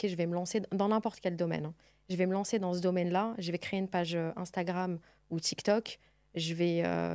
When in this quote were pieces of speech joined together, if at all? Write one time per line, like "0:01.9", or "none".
none